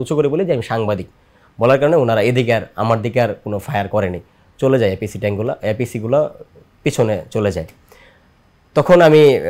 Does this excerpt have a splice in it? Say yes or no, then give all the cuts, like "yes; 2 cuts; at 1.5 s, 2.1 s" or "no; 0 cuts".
no; 0 cuts